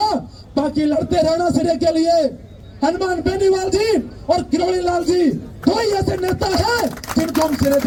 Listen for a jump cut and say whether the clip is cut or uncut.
uncut